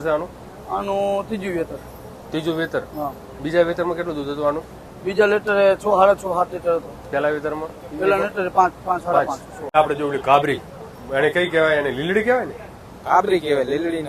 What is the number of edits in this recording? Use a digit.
1